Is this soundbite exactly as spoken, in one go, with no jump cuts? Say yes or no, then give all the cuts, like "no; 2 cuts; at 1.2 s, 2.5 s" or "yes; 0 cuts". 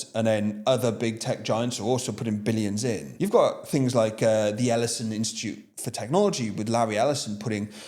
no; 1 cut; at 3.1 s